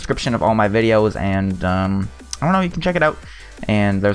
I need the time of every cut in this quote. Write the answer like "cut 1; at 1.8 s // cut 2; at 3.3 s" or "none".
cut 1; at 2.3 s